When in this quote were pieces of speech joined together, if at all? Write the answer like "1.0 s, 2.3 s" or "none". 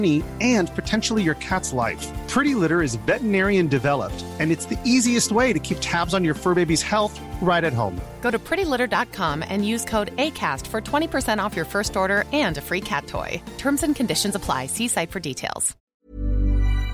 15.8 s